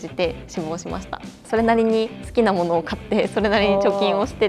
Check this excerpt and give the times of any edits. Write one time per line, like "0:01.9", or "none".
0:01.3